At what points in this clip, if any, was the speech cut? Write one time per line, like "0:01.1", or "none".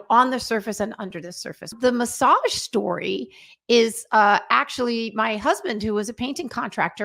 0:01.7